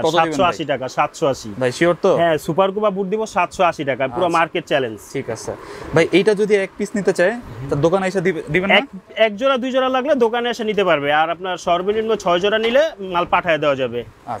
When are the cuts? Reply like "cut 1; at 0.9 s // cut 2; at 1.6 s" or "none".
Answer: none